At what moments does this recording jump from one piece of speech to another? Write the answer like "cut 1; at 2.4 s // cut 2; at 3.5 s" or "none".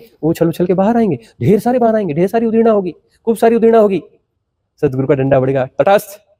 none